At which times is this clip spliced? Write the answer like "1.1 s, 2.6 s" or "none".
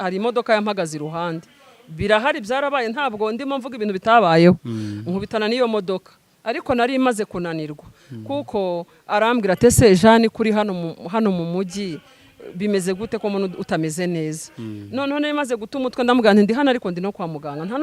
none

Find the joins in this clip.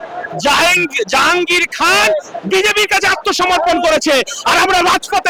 none

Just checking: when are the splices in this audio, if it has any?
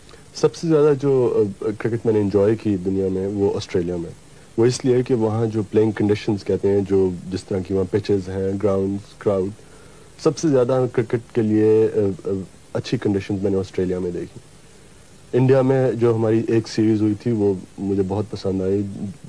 none

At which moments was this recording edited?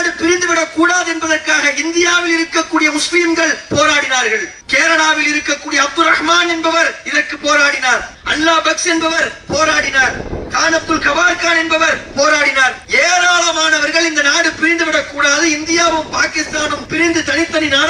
4.6 s, 8.2 s, 12.8 s, 16.8 s

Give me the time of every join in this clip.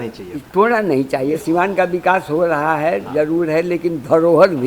1.4 s

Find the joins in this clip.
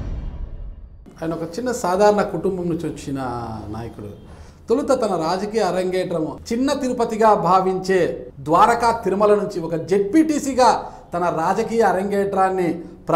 1.0 s, 6.4 s, 8.3 s

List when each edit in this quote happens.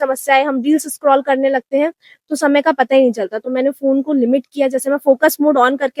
none

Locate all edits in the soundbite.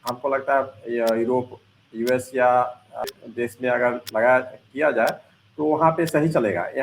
3.1 s

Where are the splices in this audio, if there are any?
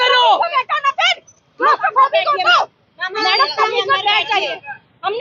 none

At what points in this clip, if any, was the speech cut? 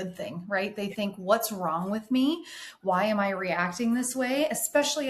none

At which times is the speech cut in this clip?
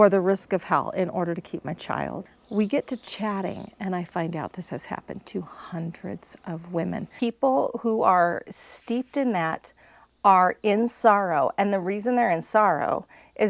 2.2 s, 7.1 s

